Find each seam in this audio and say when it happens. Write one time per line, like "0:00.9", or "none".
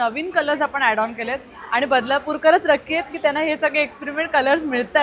none